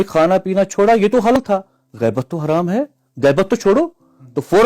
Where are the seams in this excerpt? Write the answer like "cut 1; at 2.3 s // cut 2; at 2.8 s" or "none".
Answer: cut 1; at 1.4 s